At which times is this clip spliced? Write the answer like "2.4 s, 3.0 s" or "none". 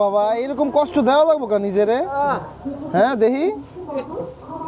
none